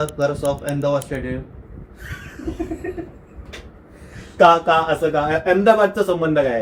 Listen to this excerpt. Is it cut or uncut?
uncut